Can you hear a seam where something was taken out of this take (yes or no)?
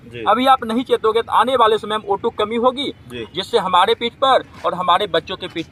no